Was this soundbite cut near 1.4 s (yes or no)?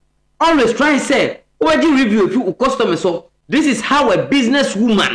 no